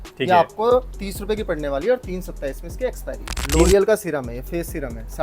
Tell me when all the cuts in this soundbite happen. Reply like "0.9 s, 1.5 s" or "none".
3.7 s